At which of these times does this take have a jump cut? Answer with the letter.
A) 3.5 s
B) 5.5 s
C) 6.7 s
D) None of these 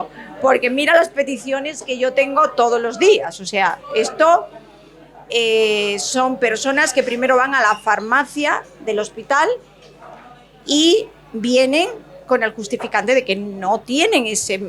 D